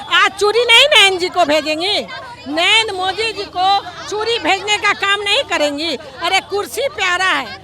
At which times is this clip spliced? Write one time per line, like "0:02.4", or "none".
none